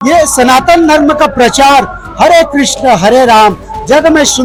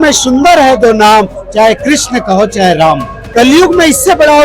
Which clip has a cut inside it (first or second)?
second